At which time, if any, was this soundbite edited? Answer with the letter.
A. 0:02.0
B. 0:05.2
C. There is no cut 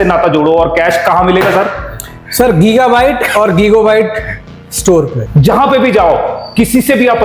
B